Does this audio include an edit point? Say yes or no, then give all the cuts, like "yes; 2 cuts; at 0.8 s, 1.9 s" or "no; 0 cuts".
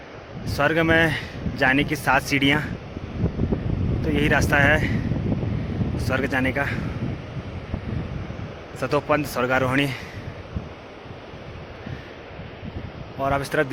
no; 0 cuts